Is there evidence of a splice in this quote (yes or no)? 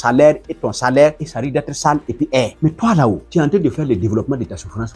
yes